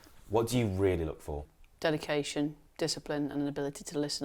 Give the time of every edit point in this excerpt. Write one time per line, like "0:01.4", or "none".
0:01.5